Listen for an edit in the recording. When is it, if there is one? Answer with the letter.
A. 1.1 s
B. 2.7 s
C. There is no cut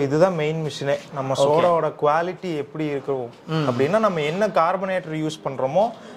A